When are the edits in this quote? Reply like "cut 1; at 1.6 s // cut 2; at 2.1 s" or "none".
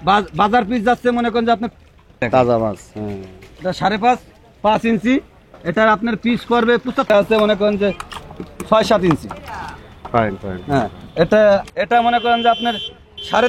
cut 1; at 2.2 s // cut 2; at 7.1 s // cut 3; at 11.7 s

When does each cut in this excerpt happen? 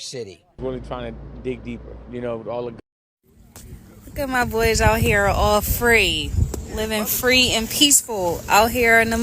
cut 1; at 2.8 s

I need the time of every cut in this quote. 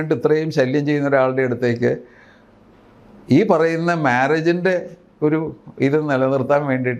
none

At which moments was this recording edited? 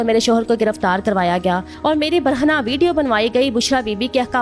cut 1; at 1.7 s

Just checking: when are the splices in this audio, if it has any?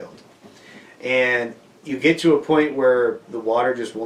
none

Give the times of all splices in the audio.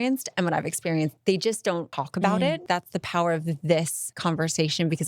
cut 1; at 1.9 s // cut 2; at 2.6 s // cut 3; at 4.0 s

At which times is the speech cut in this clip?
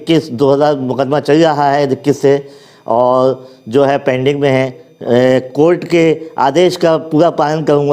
cut 1; at 4.9 s

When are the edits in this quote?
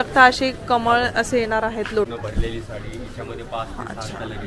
cut 1; at 2.1 s

